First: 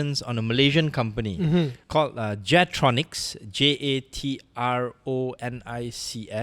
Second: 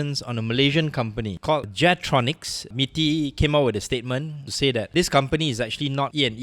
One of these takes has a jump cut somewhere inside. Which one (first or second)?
second